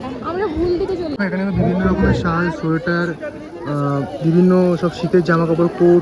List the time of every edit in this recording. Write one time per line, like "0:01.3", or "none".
0:01.2